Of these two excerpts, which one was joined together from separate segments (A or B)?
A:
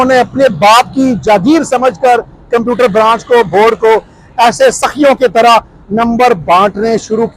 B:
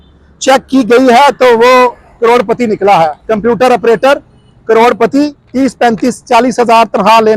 B